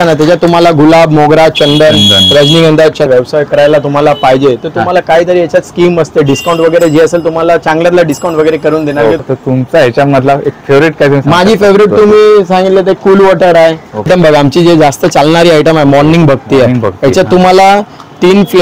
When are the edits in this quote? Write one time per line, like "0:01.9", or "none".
0:03.1
0:09.2
0:14.1